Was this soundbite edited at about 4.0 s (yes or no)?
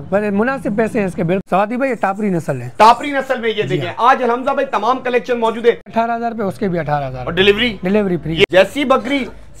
no